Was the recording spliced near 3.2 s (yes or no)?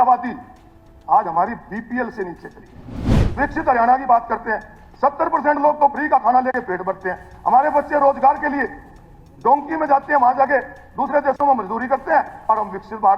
yes